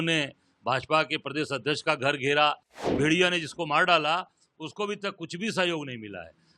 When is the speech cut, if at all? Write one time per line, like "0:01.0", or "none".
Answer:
0:02.9